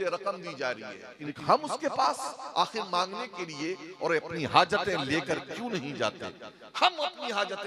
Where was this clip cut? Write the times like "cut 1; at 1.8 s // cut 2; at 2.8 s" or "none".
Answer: cut 1; at 1.3 s

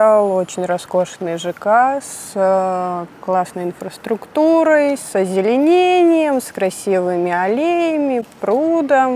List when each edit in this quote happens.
none

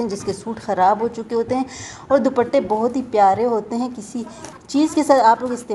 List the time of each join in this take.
none

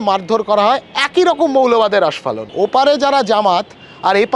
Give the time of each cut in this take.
cut 1; at 2.4 s

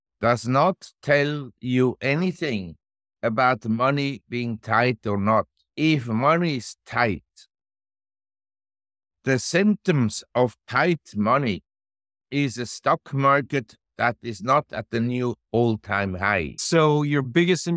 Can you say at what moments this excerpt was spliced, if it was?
cut 1; at 5.6 s // cut 2; at 16.6 s

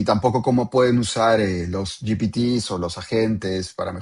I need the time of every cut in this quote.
none

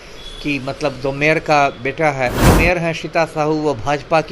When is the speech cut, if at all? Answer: cut 1; at 2.5 s

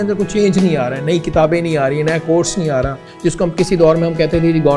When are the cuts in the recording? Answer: cut 1; at 3.0 s

